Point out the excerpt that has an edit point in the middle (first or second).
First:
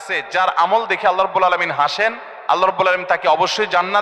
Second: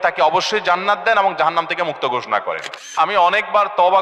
second